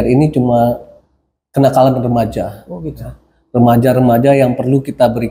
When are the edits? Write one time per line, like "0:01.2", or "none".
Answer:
none